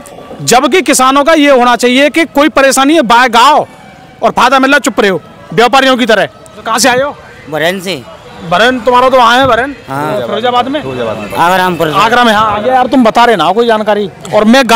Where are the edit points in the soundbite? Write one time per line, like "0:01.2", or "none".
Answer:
0:06.7
0:12.6